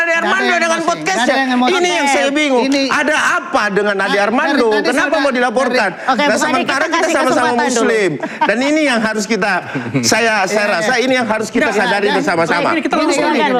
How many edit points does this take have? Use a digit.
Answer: 0